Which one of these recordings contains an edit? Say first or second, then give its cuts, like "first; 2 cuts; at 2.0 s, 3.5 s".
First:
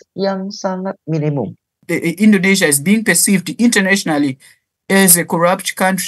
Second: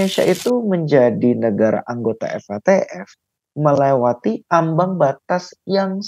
first; 1 cut; at 1.8 s